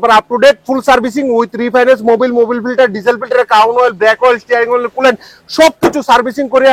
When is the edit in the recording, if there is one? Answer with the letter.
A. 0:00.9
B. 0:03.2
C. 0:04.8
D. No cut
D